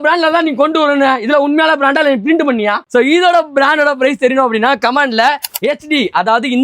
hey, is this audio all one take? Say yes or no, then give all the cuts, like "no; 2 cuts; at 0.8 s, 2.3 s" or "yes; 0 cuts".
no; 1 cut; at 2.8 s